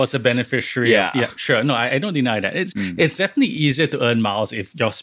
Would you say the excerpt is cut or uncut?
uncut